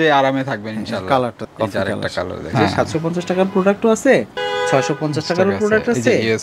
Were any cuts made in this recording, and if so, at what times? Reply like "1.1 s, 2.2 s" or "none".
2.4 s

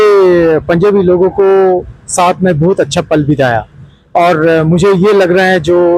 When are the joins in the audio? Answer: none

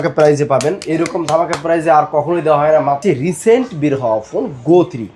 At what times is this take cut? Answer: 3.0 s

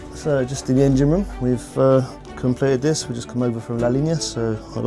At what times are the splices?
none

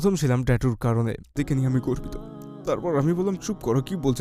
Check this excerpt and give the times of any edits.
1.3 s

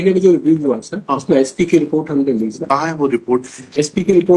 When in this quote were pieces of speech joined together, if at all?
none

